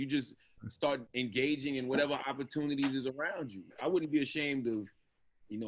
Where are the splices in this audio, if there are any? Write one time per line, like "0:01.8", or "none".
0:01.1
0:03.8